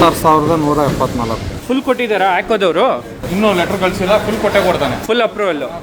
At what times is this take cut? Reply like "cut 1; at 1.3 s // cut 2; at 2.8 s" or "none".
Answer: cut 1; at 1.6 s

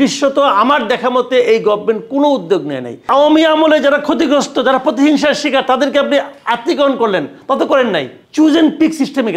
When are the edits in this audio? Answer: cut 1; at 3.1 s // cut 2; at 8.2 s

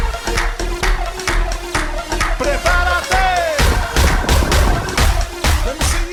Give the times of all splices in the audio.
none

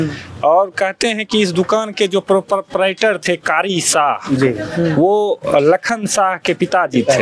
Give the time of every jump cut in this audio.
none

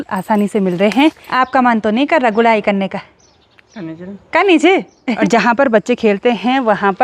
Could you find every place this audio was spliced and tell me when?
cut 1; at 1.2 s // cut 2; at 5.2 s

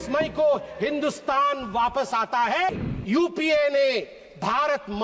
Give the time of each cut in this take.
cut 1; at 2.7 s

